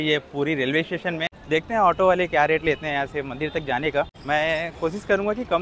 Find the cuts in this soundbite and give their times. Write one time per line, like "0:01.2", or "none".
0:01.3
0:04.2

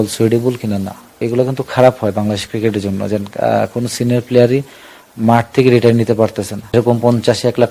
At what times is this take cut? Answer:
0:01.1
0:06.7

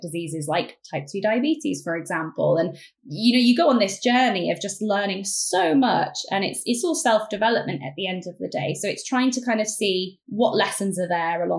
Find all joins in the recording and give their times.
0:10.2

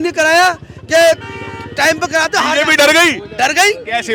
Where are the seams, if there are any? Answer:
none

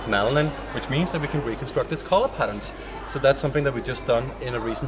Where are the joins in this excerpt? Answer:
0:03.3

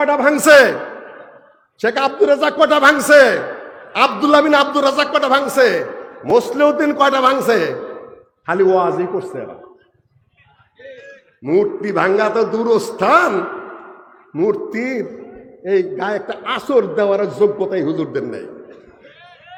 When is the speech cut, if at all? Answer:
none

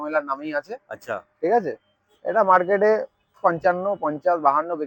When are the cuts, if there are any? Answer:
none

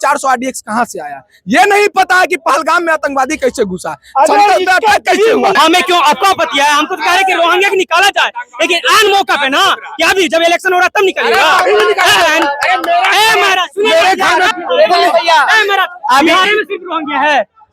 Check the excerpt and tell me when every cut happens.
0:05.5
0:14.5

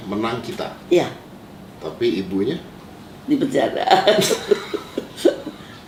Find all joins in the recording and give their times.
none

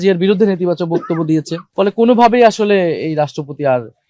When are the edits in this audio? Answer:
0:01.6

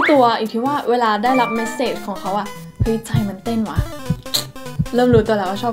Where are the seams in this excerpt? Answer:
none

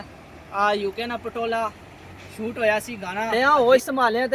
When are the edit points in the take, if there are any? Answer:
0:03.3

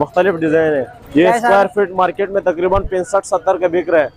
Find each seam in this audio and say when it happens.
0:01.0

